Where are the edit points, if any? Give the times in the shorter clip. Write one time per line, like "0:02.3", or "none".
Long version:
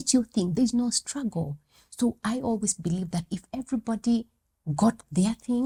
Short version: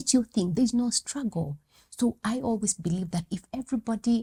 none